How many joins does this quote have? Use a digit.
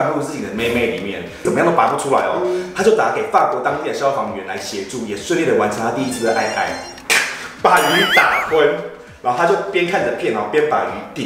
2